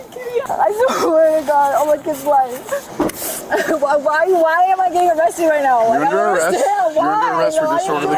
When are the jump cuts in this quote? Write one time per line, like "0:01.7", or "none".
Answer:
none